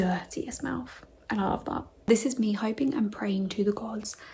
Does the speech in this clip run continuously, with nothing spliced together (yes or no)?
no